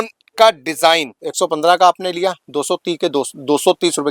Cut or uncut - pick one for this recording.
cut